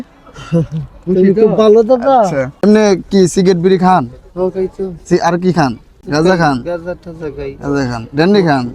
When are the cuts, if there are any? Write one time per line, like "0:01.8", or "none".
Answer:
0:02.5
0:06.0